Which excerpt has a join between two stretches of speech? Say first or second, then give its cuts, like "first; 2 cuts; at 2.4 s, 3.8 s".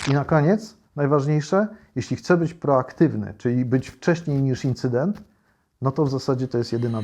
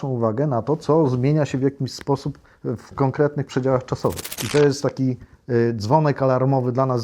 second; 1 cut; at 4.3 s